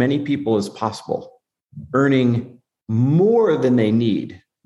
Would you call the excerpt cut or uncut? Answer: uncut